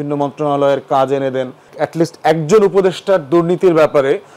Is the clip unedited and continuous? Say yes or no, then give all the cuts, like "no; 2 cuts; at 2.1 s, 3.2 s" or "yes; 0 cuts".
no; 1 cut; at 1.7 s